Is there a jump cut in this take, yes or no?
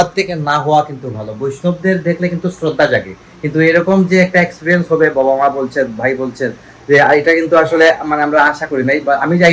no